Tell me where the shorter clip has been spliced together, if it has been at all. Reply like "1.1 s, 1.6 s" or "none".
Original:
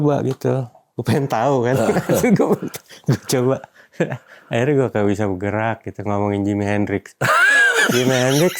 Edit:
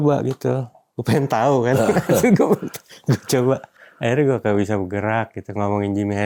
3.8 s